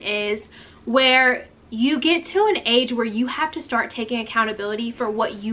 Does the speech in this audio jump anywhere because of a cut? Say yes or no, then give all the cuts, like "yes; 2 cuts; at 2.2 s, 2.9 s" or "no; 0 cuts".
no; 0 cuts